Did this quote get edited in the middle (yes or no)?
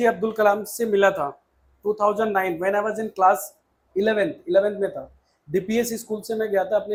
no